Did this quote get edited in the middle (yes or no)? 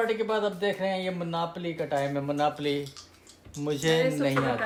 no